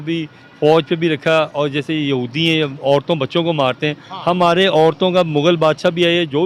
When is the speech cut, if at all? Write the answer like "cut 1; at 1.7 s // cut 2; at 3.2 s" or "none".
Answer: none